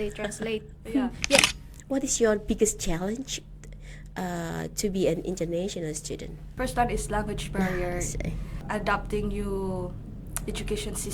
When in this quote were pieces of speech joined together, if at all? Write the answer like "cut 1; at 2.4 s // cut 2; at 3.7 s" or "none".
cut 1; at 1.4 s // cut 2; at 6.4 s // cut 3; at 8.5 s